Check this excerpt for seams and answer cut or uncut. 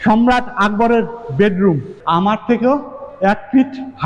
cut